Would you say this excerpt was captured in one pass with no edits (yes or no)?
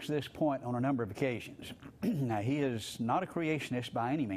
no